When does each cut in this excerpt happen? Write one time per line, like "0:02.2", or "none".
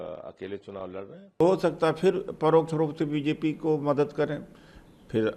0:01.4